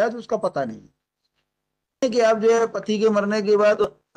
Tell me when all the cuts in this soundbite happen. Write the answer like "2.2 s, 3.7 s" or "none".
2.0 s